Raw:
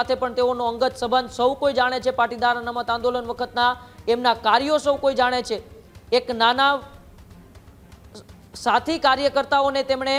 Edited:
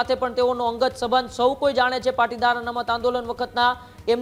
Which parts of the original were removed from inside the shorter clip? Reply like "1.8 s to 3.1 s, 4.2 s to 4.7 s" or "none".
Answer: none

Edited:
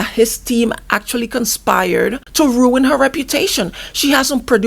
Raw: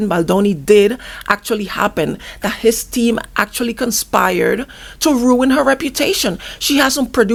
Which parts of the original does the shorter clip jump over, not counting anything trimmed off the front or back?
4.7 s to 4.9 s

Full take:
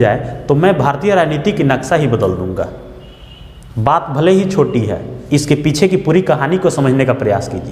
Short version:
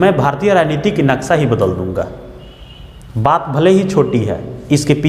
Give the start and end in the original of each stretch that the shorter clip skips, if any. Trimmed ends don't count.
none

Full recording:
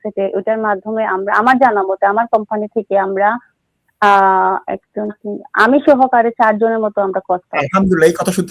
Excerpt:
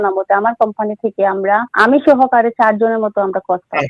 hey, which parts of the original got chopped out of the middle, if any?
3.4 s to 5.5 s

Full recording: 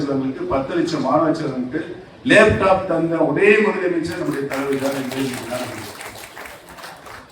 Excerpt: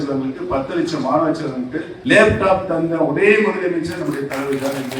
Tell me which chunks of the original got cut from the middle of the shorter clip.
1.9 s to 2.1 s

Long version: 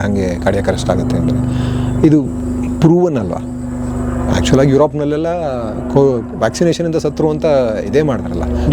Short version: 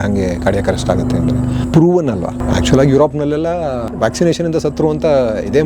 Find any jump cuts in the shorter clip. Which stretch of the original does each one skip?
1.6 s to 2.7 s, 3.5 s to 4.2 s, 5.7 s to 6.3 s

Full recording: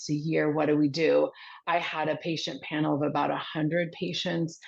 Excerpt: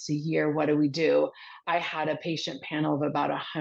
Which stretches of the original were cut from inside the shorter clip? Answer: none

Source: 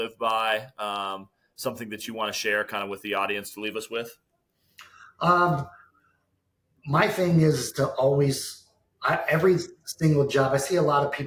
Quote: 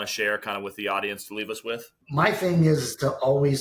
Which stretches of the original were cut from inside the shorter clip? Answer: 4.2 s to 6.7 s

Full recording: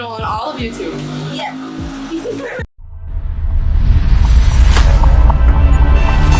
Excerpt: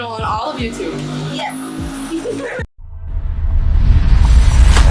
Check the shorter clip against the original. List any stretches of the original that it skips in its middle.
none

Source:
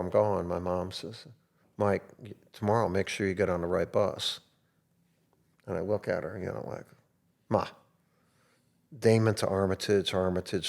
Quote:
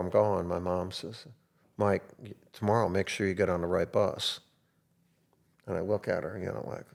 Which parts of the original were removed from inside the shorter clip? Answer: none

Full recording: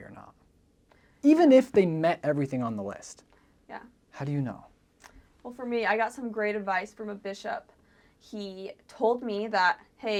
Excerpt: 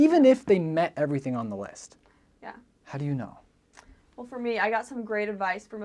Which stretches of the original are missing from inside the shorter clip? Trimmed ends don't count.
none

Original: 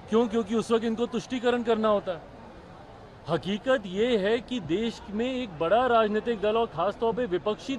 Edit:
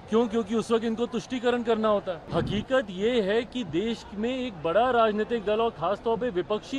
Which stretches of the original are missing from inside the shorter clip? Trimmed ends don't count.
2.2 s to 3.1 s

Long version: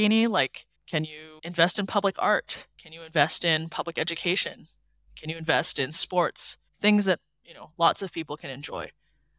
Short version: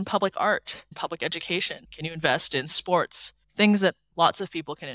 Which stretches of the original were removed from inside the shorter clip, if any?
2.7 s to 3.7 s, 4.6 s to 5.1 s, 7.3 s to 7.7 s

